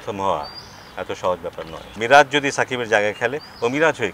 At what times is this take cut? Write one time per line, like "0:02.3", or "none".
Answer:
0:01.8